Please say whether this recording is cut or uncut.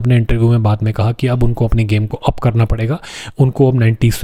uncut